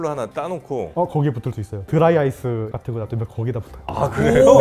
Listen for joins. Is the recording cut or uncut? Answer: uncut